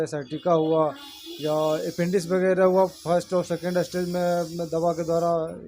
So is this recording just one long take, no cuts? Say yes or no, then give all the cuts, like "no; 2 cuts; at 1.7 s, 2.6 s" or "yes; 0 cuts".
yes; 0 cuts